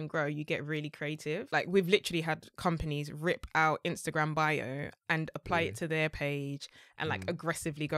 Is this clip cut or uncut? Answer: cut